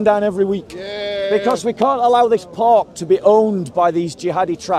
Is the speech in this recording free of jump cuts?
yes; 0 cuts

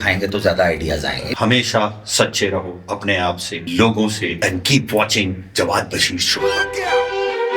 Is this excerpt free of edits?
no; 4 cuts; at 1.2 s, 3.7 s, 4.3 s, 6.6 s

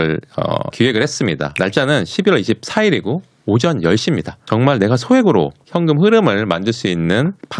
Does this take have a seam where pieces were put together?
yes; 1 cut; at 4.4 s

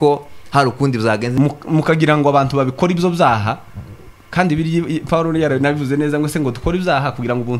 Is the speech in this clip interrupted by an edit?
yes; 1 cut; at 1.3 s

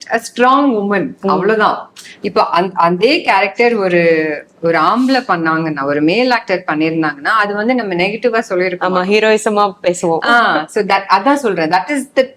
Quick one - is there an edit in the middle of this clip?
no; 0 cuts

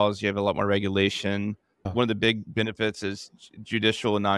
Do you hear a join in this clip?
yes; 1 cut; at 1.8 s

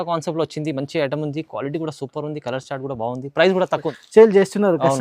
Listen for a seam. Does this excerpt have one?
yes; 1 cut; at 4.0 s

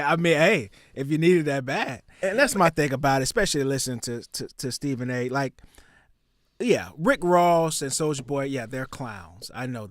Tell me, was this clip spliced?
yes; 1 cut; at 2.2 s

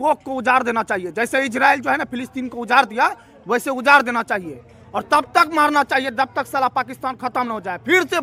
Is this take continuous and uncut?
yes; 0 cuts

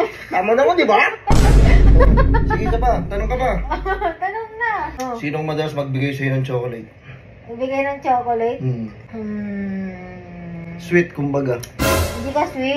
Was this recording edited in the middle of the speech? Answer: no; 0 cuts

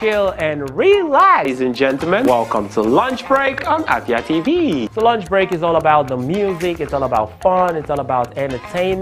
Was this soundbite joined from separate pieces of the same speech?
no; 0 cuts

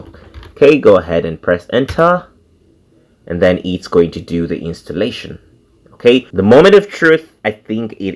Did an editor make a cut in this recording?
yes; 1 cut; at 6.3 s

